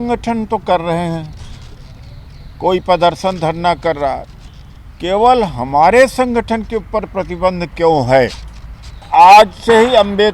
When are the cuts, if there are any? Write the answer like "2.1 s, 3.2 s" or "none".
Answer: 9.1 s